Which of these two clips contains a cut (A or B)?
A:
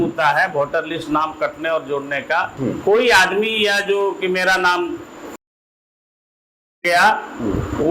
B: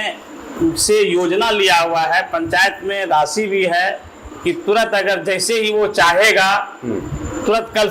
A